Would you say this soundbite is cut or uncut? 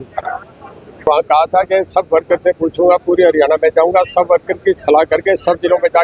cut